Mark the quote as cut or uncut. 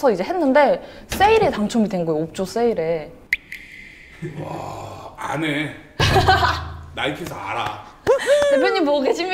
uncut